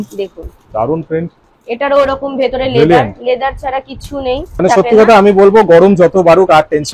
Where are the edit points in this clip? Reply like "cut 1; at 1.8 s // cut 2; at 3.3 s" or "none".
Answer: cut 1; at 4.6 s

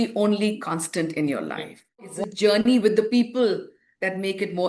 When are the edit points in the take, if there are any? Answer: cut 1; at 2.0 s

